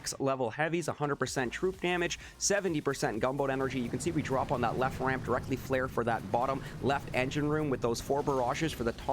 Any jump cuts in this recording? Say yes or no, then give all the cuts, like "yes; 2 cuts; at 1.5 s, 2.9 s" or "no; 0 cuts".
no; 0 cuts